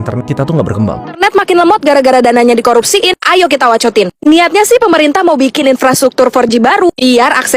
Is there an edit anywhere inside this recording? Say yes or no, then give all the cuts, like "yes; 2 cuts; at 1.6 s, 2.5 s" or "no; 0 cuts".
yes; 1 cut; at 1.2 s